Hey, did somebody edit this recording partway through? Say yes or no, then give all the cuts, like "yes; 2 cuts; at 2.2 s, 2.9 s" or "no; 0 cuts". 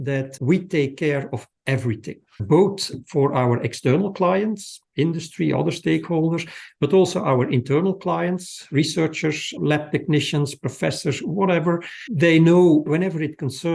no; 0 cuts